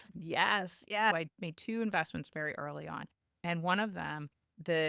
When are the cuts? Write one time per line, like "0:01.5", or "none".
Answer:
0:01.1